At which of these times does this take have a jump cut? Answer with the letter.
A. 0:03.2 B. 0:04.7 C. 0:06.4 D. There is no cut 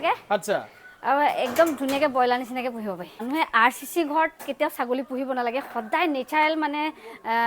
A